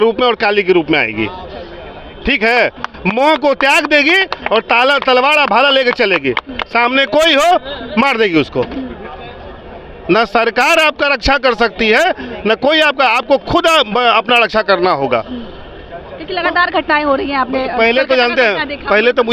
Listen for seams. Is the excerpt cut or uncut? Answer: uncut